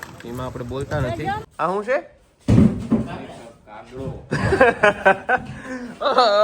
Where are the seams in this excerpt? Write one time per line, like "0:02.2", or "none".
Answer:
0:01.5